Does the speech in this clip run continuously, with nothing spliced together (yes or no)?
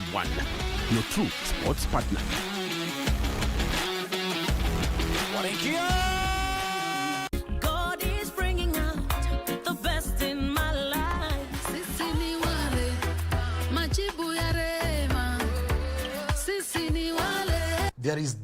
no